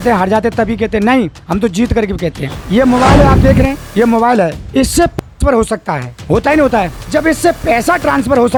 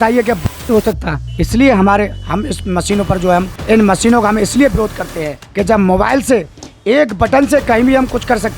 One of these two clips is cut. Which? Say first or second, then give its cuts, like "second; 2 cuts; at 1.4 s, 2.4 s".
second; 1 cut; at 3.5 s